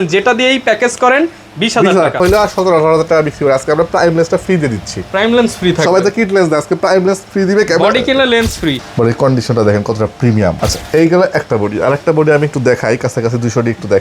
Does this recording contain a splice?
yes; 3 cuts; at 2.2 s, 8.8 s, 10.6 s

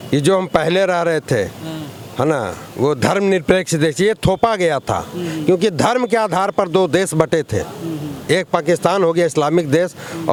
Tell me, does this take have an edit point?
no; 0 cuts

